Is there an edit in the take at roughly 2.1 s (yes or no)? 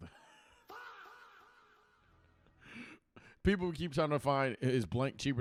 no